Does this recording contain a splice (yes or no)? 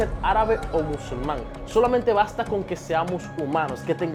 no